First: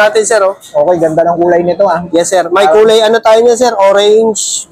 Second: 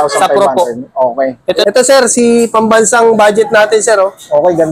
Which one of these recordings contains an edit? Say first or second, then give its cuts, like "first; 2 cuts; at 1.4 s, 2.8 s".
second; 1 cut; at 1.6 s